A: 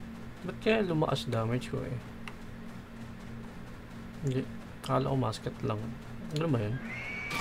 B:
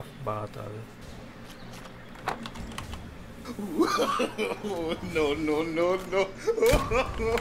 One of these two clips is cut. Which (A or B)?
B